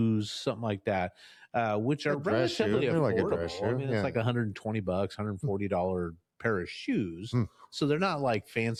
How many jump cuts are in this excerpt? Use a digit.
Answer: 0